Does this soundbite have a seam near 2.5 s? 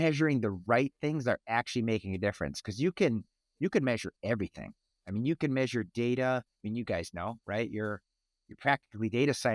no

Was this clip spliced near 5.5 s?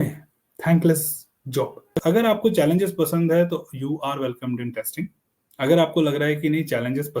no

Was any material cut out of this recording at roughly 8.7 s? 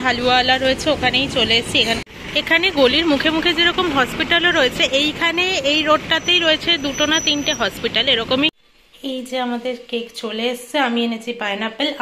yes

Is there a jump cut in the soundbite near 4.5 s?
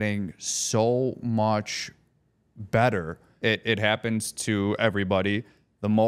no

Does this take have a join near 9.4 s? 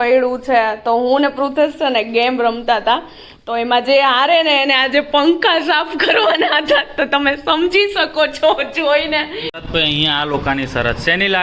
yes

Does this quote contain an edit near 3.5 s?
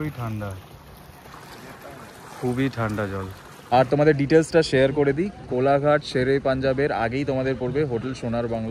yes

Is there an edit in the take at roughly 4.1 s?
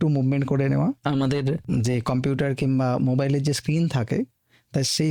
no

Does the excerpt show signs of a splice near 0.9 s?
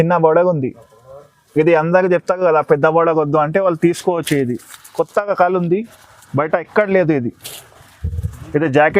no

